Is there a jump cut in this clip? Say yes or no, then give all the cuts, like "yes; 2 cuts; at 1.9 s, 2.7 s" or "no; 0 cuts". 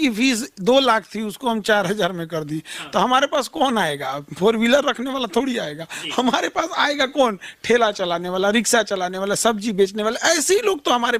no; 0 cuts